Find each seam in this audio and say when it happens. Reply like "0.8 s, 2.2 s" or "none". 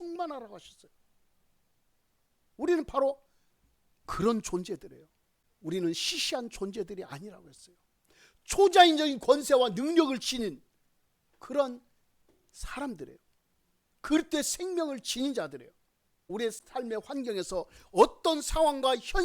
5.5 s